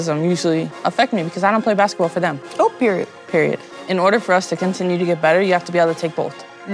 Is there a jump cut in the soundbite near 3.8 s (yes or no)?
yes